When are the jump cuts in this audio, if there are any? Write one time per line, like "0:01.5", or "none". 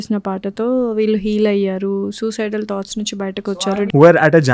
0:03.5